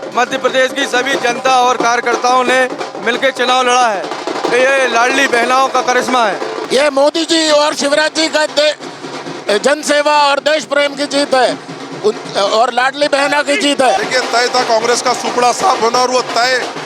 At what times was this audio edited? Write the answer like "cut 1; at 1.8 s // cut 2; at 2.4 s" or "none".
cut 1; at 6.6 s // cut 2; at 14.0 s